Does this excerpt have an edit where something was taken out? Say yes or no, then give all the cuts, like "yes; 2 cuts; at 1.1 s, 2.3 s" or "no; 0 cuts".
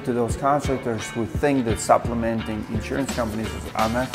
no; 0 cuts